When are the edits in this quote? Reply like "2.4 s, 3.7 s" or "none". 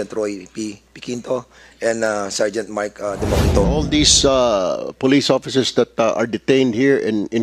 3.7 s